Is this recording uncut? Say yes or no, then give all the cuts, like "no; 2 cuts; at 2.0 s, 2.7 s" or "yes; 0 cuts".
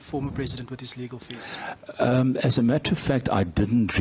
yes; 0 cuts